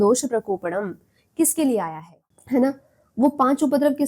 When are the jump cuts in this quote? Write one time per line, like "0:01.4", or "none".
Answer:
0:02.3